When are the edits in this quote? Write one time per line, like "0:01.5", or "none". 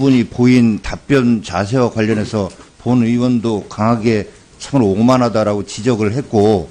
0:01.4